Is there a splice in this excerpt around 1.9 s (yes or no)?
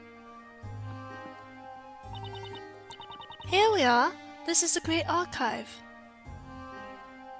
no